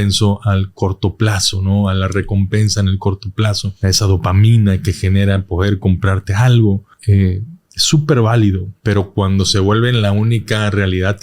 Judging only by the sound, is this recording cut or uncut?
cut